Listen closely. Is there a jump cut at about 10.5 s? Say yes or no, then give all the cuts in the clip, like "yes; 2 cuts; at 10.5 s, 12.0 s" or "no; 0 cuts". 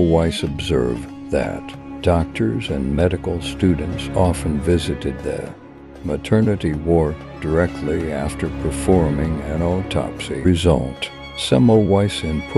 yes; 1 cut; at 10.5 s